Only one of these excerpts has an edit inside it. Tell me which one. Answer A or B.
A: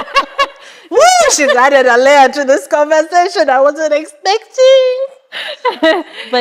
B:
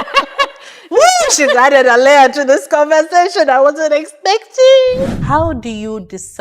B